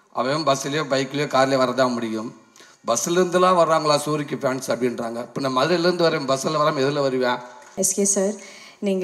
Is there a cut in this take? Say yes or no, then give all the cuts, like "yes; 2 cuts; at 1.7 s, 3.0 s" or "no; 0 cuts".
yes; 1 cut; at 7.7 s